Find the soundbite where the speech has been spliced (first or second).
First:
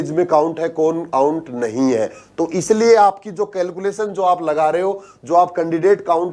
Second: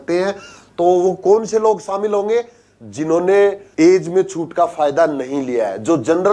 second